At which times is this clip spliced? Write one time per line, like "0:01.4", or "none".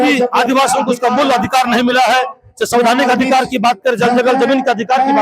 none